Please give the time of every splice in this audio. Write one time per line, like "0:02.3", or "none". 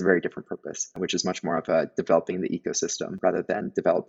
none

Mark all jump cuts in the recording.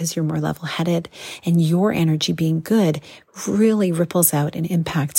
none

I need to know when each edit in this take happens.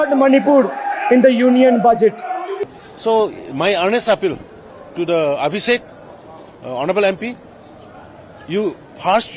0:02.7

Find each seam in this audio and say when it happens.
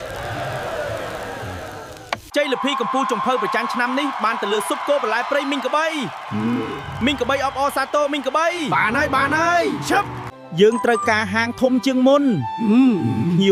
none

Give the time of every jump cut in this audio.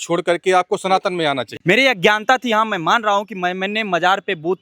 0:01.5

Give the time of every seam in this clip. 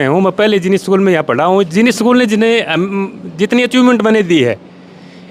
none

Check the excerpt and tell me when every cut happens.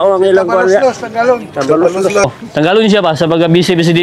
0:02.2

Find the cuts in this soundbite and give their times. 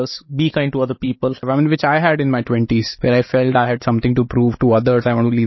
0:01.4
0:02.9

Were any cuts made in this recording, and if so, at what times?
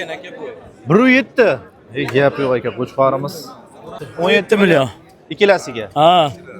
0:04.0

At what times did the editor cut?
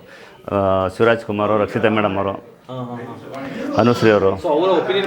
none

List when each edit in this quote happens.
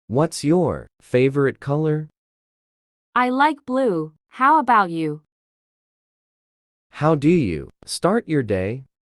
0:00.9

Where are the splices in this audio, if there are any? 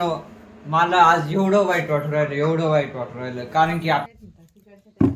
0:04.1

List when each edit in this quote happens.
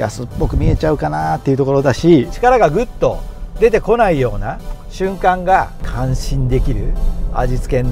0:02.3
0:05.7

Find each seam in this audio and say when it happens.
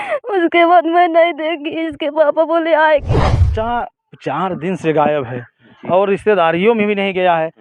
0:03.1

